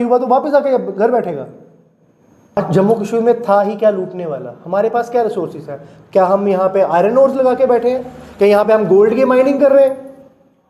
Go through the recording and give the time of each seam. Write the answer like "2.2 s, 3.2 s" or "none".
2.6 s